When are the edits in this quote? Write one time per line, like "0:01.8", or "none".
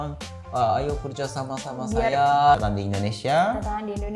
0:02.6